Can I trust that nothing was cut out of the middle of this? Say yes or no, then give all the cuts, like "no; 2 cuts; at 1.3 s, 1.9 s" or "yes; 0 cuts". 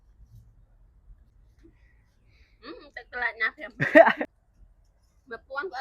no; 2 cuts; at 1.3 s, 4.3 s